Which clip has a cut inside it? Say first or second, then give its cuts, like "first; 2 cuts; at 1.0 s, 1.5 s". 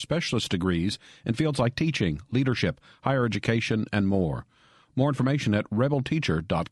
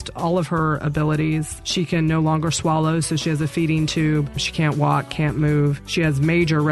second; 3 cuts; at 1.6 s, 4.4 s, 5.8 s